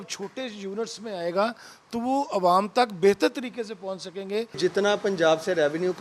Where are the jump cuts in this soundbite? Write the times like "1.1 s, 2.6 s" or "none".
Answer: 4.6 s